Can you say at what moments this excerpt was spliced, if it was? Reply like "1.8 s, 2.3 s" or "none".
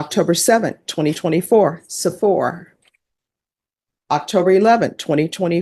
none